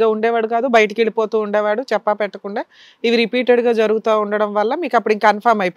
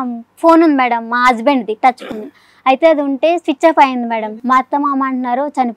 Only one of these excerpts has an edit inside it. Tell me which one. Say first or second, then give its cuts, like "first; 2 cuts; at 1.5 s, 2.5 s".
second; 1 cut; at 4.2 s